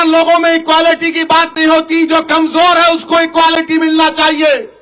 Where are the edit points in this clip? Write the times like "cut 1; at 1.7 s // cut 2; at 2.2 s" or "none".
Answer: none